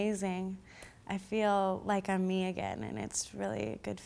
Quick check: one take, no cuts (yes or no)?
yes